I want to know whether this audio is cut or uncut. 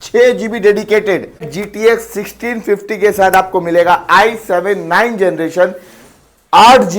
cut